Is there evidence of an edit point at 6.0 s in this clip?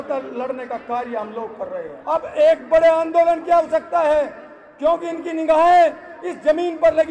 no; 1 cut; at 1.9 s

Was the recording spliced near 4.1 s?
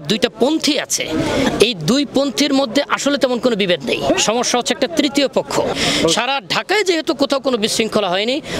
yes; 2 cuts; at 4.1 s, 5.7 s

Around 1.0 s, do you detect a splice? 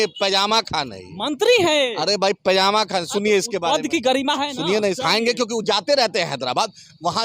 no; 1 cut; at 5.0 s

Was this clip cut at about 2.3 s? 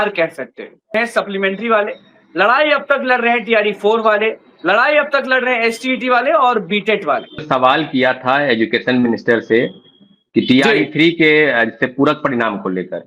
no; 2 cuts; at 0.9 s, 7.5 s

